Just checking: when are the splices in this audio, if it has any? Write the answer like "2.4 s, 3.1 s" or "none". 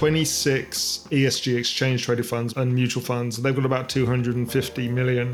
1.1 s, 2.5 s

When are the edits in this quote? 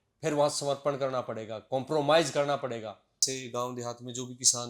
3.1 s

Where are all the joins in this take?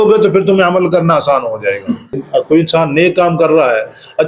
2.2 s

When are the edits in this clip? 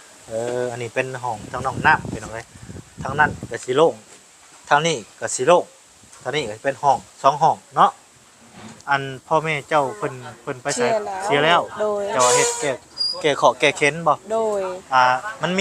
8.7 s

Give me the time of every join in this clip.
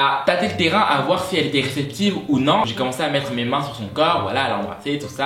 none

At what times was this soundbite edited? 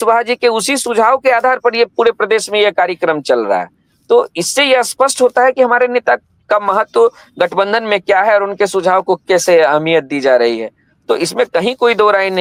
none

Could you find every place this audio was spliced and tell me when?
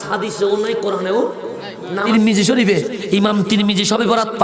2.1 s

